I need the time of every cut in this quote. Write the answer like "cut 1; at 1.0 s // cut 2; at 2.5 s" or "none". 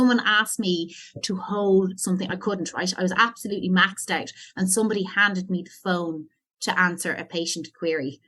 none